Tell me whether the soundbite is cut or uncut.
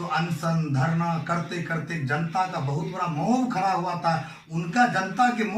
uncut